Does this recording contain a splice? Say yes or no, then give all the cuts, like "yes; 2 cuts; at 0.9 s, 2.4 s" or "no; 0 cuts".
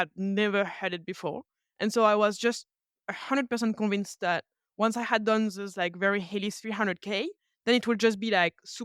no; 0 cuts